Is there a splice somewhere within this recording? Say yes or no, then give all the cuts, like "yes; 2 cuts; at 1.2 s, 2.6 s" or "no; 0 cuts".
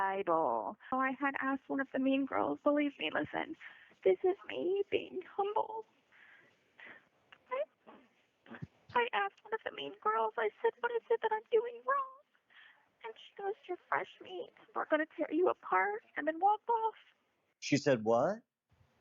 yes; 1 cut; at 0.9 s